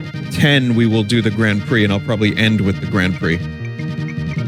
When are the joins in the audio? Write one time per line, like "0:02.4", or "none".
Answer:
0:02.6